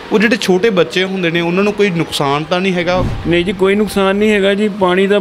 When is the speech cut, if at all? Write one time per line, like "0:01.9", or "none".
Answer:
0:03.1